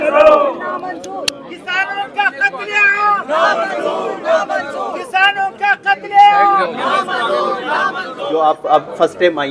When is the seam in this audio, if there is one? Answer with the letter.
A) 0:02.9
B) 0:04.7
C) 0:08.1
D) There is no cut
C